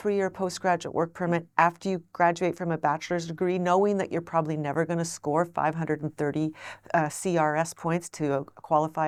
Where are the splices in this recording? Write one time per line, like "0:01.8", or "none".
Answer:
none